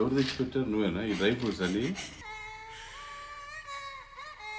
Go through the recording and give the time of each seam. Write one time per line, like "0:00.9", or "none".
none